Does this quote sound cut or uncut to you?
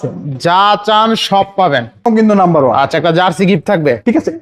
cut